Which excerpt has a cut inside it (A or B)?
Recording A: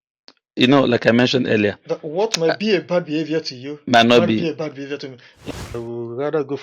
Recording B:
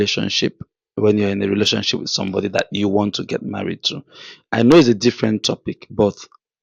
A